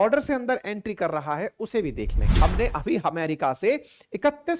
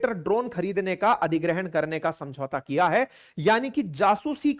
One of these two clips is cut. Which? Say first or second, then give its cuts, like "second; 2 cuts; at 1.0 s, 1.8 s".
first; 1 cut; at 2.2 s